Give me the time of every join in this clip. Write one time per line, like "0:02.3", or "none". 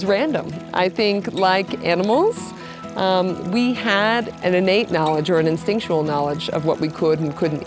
0:04.3